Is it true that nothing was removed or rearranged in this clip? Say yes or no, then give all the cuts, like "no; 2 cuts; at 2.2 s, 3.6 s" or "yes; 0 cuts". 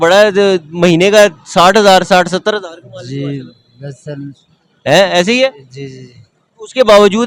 yes; 0 cuts